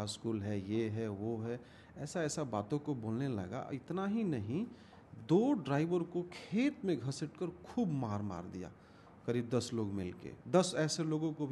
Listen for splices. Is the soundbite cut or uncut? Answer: cut